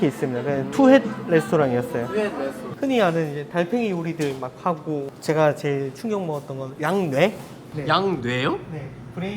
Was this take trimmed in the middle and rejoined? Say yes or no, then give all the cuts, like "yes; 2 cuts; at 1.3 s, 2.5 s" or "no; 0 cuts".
yes; 3 cuts; at 2.7 s, 6.7 s, 7.6 s